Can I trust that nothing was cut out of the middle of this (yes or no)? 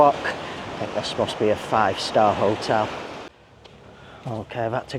no